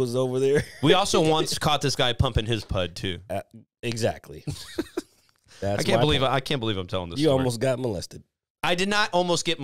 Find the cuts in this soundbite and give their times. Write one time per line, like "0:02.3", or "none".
none